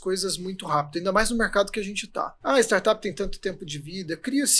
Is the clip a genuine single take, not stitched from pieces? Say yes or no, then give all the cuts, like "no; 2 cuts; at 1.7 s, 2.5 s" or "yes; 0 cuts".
no; 1 cut; at 2.3 s